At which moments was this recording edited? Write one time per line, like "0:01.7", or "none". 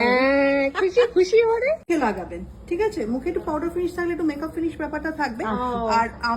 0:01.9